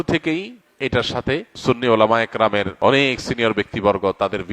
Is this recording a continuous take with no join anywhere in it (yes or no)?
no